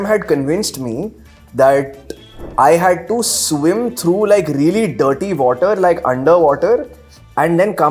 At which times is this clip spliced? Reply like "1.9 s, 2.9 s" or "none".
none